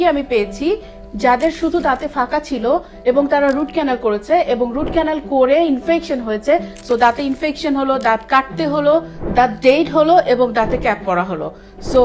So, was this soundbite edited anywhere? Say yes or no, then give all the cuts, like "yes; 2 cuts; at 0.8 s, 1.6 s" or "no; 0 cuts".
no; 0 cuts